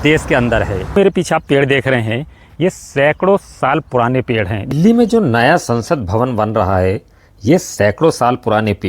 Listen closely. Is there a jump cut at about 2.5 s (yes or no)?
no